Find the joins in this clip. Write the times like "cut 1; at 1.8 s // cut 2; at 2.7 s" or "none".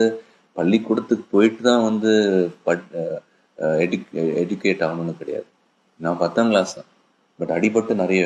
cut 1; at 5.6 s